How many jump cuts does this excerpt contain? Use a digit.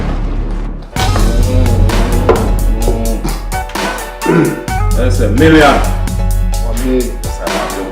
1